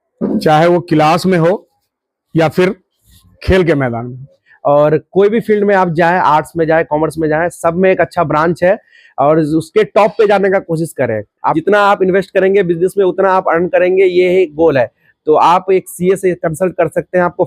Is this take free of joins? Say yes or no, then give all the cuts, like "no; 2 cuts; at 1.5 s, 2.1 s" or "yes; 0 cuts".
no; 2 cuts; at 4.4 s, 11.4 s